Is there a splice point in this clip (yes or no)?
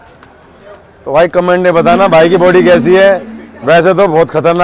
no